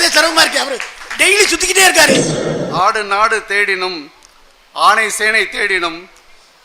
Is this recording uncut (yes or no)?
no